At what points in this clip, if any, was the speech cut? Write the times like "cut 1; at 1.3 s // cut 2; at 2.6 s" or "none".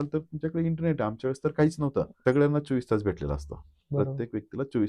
cut 1; at 2.1 s